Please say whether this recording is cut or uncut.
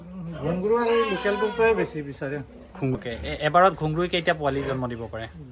cut